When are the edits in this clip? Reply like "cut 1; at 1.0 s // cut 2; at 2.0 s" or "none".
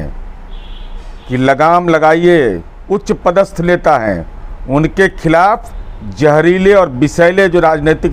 cut 1; at 2.7 s